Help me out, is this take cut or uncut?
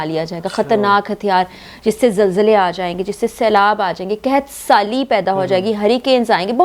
uncut